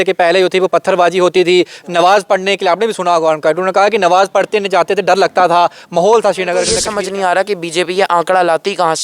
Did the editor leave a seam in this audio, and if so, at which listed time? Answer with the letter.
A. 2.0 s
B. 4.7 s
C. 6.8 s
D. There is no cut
C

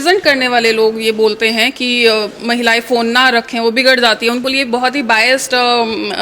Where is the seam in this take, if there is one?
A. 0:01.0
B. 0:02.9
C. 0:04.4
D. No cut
C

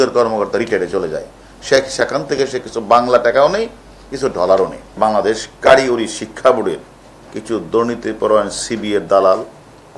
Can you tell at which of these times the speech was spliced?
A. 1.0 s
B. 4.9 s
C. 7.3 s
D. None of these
B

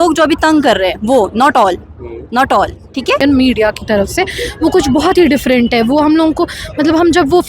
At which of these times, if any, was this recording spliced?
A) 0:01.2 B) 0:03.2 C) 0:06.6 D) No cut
B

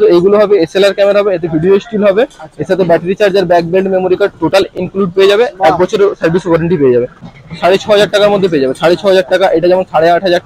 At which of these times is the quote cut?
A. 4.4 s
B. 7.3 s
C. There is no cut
B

